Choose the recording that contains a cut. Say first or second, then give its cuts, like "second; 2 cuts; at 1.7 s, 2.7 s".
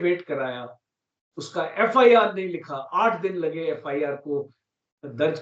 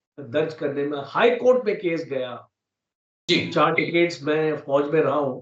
second; 1 cut; at 3.1 s